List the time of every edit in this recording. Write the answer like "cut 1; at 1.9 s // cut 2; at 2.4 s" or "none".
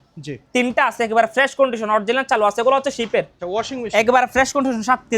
cut 1; at 3.4 s

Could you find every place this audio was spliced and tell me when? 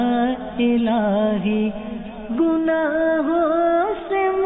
none

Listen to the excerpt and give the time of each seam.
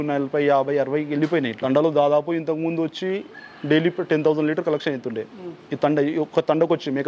cut 1; at 1.6 s

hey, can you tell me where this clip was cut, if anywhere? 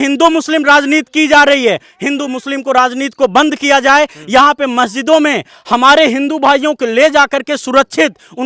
none

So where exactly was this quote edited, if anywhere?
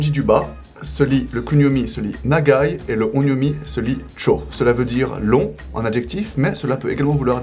none

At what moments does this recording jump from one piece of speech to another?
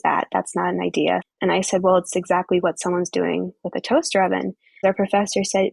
cut 1; at 1.2 s // cut 2; at 4.8 s

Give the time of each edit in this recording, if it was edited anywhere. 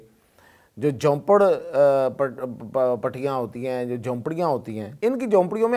cut 1; at 4.9 s

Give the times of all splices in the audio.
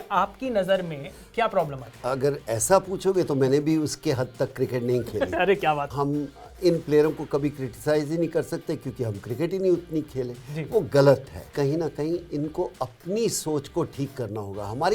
cut 1; at 5.9 s // cut 2; at 11.4 s

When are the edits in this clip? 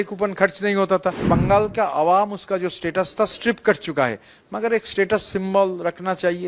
cut 1; at 1.2 s

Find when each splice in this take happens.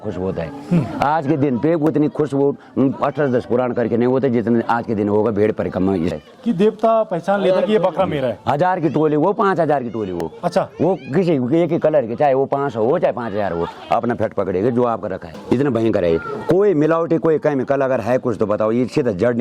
cut 1; at 6.1 s // cut 2; at 15.3 s

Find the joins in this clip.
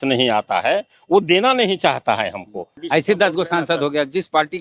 cut 1; at 2.7 s

